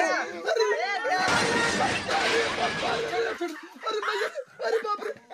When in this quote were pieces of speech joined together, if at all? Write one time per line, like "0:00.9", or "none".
0:03.3

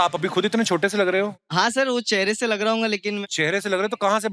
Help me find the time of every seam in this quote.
0:01.4
0:03.2

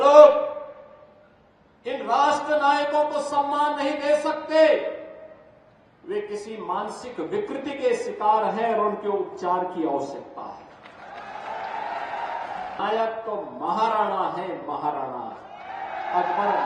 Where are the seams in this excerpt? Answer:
0:12.8

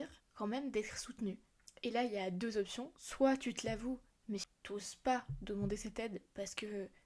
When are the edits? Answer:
0:04.5

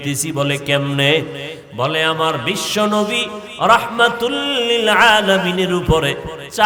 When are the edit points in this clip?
none

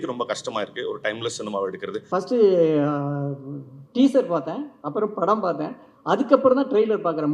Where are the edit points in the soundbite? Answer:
0:02.0

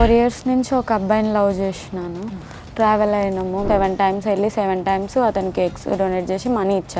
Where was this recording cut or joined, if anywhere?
0:03.6

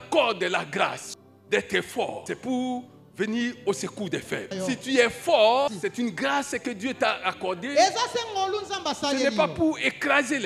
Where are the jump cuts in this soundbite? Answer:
0:01.0
0:02.2
0:04.5
0:05.7

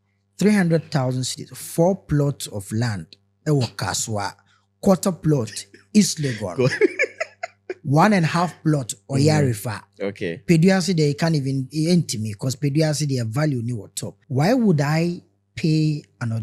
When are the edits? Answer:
0:14.2

